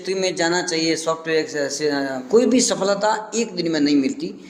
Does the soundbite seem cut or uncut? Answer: cut